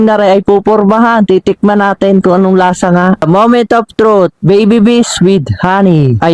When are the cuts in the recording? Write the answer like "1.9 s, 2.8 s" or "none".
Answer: 3.2 s